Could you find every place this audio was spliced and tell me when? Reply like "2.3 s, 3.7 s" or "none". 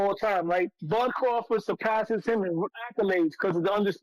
none

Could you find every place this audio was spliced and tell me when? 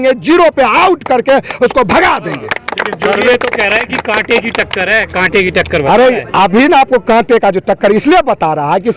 none

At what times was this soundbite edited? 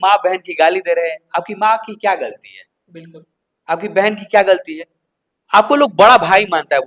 none

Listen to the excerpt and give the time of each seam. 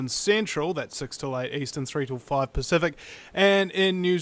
0.9 s

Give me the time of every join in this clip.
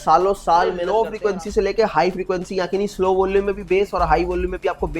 1.0 s

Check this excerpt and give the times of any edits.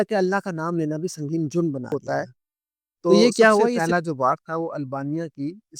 3.8 s

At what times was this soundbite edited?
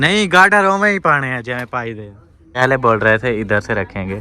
2.6 s

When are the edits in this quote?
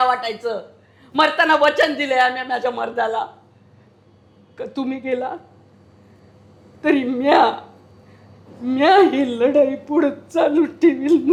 none

